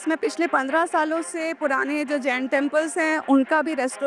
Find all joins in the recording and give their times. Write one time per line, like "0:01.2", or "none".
none